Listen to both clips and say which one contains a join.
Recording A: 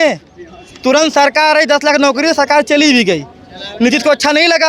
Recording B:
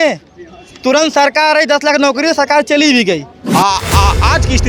B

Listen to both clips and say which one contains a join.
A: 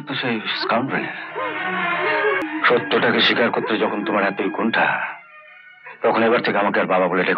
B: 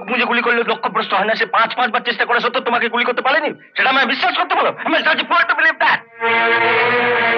A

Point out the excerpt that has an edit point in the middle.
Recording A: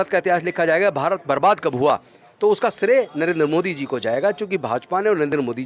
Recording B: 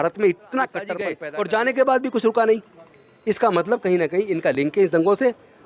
B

